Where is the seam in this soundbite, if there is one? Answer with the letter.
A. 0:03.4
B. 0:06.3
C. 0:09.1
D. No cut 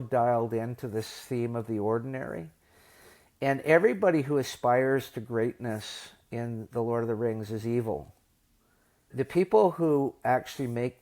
C